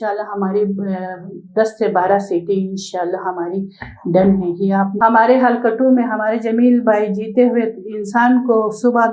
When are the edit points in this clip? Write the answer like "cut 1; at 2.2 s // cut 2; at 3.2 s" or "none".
cut 1; at 4.9 s